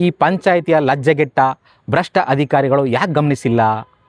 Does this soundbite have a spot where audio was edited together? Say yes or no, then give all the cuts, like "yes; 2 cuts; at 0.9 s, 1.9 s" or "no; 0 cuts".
no; 0 cuts